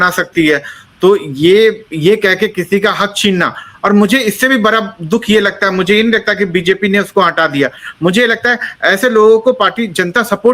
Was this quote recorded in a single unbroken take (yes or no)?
yes